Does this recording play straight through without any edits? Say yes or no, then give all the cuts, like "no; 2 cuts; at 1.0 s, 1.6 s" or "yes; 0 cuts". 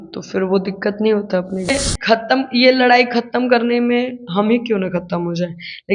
no; 1 cut; at 1.7 s